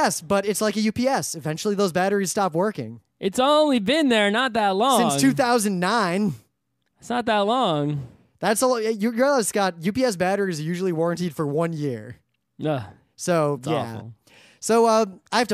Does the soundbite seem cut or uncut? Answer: uncut